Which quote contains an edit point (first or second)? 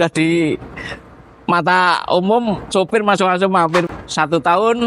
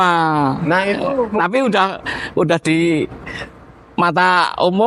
first